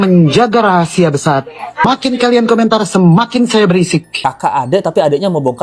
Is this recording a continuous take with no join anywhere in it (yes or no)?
no